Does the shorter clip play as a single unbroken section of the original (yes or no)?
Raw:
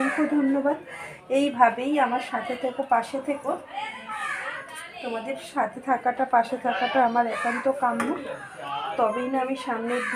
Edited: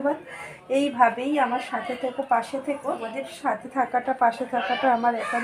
no